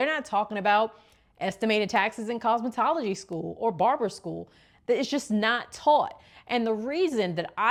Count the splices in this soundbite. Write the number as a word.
zero